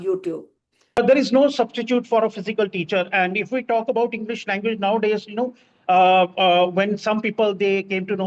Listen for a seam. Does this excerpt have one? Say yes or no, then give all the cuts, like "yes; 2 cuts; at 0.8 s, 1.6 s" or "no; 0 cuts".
yes; 1 cut; at 1.0 s